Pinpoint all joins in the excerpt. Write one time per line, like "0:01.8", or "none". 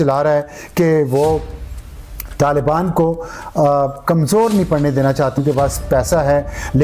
0:05.4